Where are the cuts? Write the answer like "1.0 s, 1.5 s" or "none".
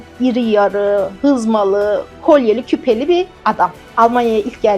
2.1 s, 3.8 s